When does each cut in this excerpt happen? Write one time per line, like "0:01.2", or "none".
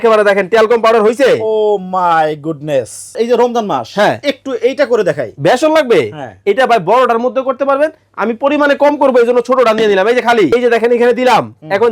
0:03.1
0:10.5